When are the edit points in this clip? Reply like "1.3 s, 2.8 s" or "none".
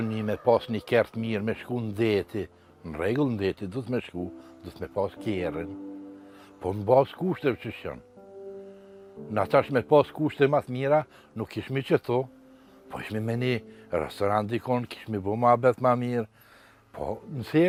none